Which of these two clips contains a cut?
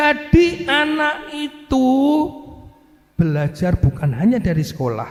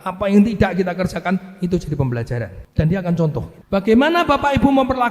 second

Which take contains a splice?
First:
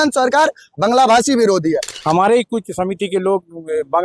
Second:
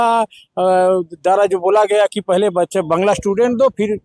first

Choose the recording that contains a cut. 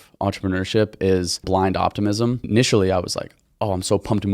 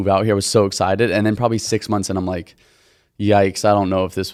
first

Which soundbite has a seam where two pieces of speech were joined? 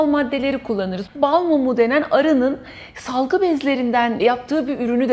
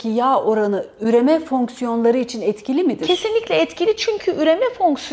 first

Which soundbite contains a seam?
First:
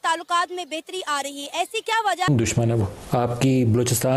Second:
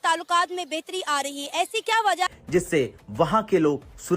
second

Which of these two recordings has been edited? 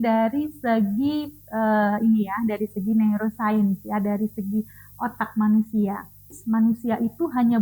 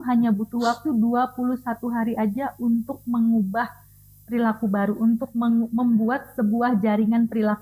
first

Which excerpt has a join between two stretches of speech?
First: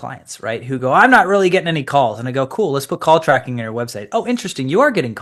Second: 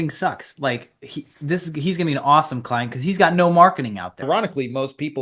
second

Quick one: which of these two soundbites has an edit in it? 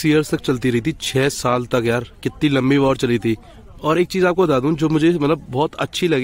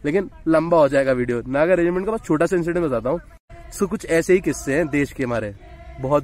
second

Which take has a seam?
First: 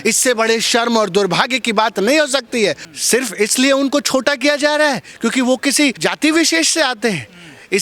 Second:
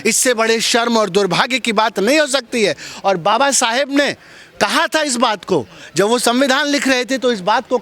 first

